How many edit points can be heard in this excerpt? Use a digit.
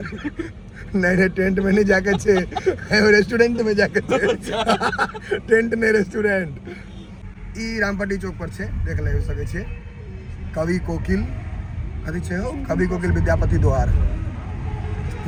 0